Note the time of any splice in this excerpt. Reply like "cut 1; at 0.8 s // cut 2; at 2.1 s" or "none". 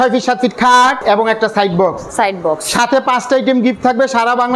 cut 1; at 1.0 s